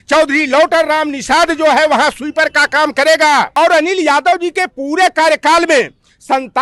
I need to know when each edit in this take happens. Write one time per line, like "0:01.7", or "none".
0:03.5